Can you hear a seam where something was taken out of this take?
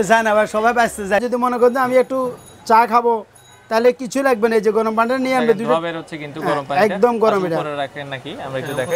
yes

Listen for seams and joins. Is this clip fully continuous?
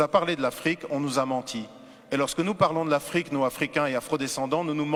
yes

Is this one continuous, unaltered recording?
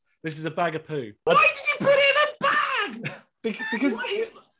no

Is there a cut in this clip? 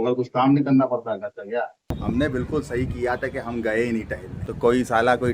yes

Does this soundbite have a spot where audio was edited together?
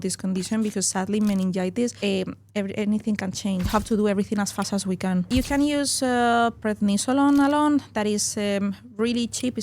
yes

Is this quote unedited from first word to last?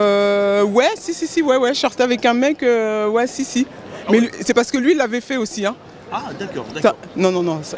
yes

